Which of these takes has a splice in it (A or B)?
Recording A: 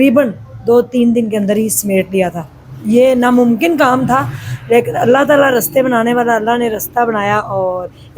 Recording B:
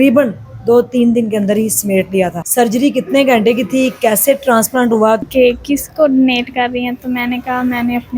B